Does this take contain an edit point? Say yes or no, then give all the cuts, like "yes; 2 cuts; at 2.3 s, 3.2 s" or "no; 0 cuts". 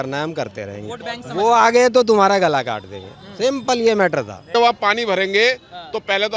yes; 1 cut; at 4.6 s